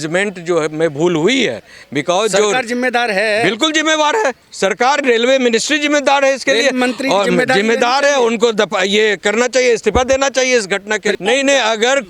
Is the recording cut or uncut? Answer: cut